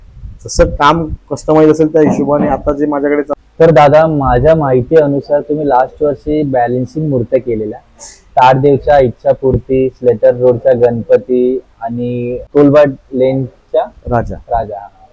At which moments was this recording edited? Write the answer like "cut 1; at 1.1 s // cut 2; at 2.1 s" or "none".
cut 1; at 3.3 s // cut 2; at 12.4 s